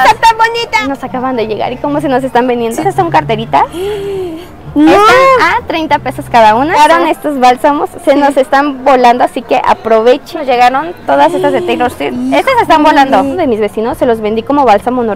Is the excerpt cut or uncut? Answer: cut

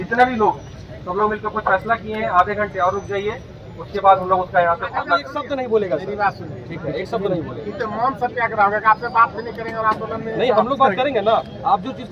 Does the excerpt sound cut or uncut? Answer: cut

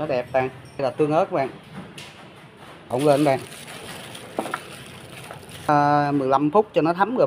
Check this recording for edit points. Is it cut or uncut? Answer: cut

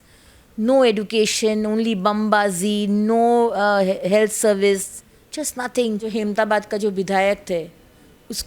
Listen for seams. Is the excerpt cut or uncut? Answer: cut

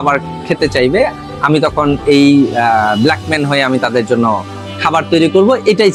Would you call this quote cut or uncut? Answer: uncut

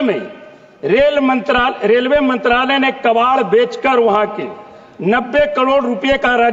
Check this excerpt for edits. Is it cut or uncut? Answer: uncut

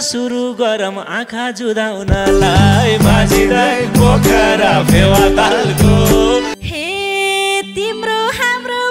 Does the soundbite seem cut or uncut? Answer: cut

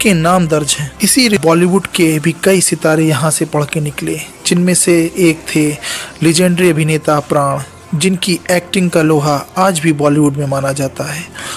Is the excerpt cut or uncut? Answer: cut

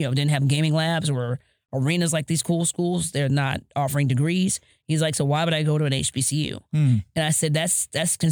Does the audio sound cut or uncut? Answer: uncut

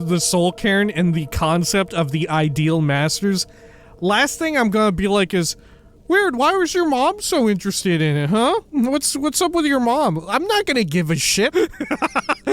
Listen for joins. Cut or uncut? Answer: cut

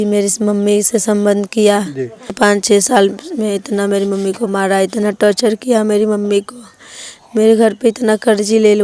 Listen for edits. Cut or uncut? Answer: cut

